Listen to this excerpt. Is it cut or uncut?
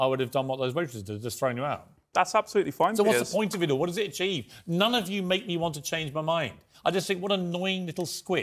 uncut